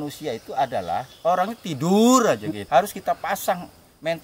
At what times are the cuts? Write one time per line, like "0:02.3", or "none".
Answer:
0:02.5

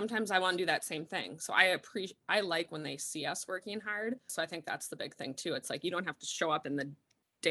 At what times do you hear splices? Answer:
0:04.3

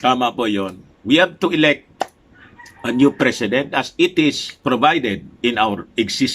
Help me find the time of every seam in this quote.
0:04.5

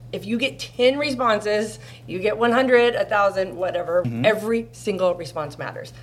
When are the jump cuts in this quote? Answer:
0:04.1

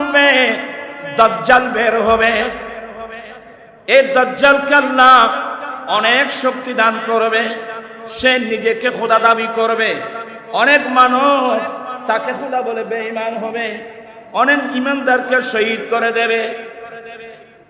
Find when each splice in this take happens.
0:03.4

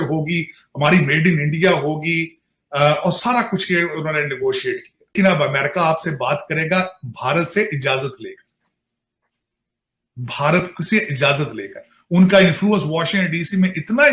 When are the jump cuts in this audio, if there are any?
0:05.1

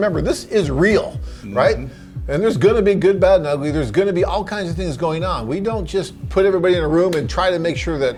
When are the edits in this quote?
none

